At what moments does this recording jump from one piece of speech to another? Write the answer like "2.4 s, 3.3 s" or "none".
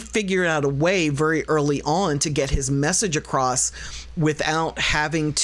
none